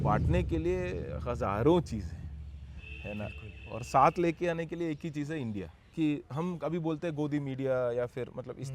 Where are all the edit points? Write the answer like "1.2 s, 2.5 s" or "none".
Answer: 5.8 s